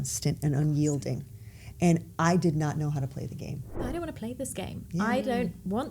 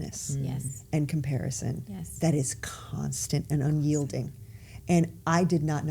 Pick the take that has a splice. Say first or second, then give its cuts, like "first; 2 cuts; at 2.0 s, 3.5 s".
first; 1 cut; at 3.8 s